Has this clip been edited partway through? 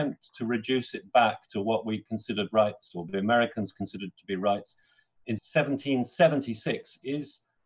no; 0 cuts

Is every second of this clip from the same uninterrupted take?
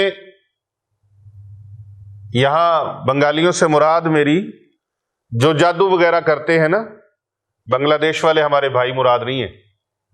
yes; 0 cuts

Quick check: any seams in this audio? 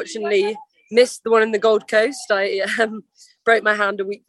no; 0 cuts

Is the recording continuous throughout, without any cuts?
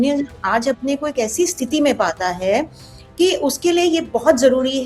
yes; 0 cuts

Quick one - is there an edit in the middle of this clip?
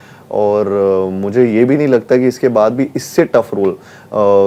no; 0 cuts

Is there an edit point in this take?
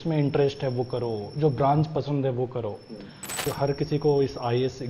yes; 1 cut; at 3.4 s

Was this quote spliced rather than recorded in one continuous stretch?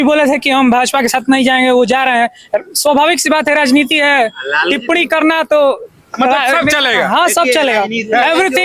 no; 0 cuts

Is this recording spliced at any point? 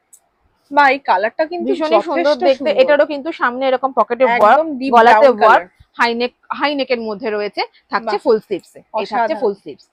no; 0 cuts

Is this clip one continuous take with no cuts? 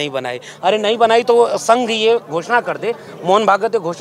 yes; 0 cuts

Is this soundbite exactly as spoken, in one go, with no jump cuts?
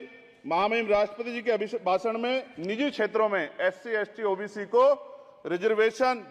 yes; 0 cuts

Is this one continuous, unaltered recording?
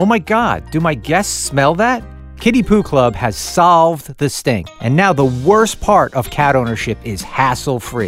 yes; 0 cuts

